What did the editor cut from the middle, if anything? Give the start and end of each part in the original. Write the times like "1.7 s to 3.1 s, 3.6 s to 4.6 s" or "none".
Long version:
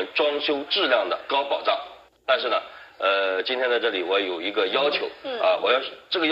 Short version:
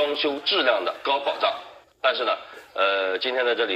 none